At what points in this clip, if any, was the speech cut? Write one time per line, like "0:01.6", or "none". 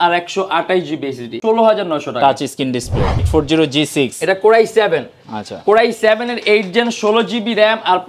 0:01.3
0:03.2